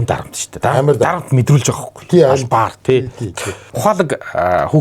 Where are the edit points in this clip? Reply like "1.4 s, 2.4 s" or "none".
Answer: 3.7 s